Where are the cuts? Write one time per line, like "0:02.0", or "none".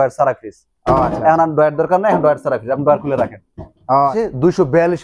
0:04.1